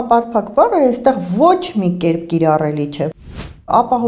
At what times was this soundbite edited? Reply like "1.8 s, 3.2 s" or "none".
3.1 s